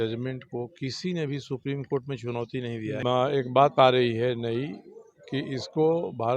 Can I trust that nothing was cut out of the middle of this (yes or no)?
no